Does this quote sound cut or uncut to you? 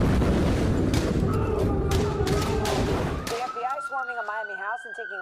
uncut